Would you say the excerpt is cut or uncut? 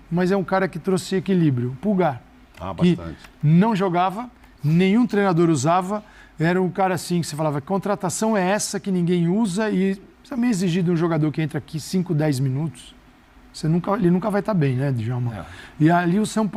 uncut